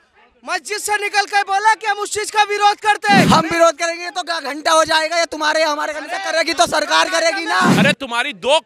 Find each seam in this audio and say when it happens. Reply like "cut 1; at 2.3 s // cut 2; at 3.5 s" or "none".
cut 1; at 3.3 s // cut 2; at 7.7 s